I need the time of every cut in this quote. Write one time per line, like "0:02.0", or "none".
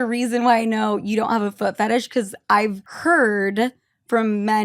0:02.9